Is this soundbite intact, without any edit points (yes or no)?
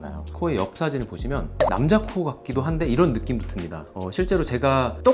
no